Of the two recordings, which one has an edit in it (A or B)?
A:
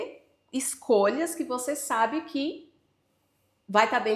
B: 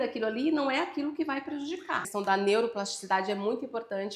B